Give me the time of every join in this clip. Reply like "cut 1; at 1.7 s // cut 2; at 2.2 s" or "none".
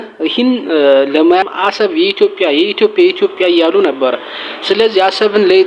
cut 1; at 1.5 s